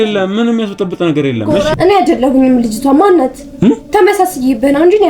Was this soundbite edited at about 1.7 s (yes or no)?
yes